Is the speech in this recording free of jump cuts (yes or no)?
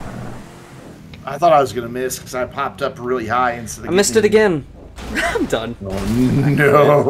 yes